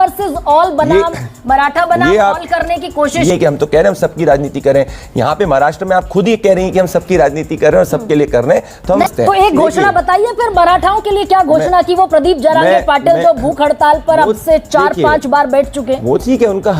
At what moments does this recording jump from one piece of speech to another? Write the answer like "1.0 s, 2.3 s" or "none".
3.3 s, 9.0 s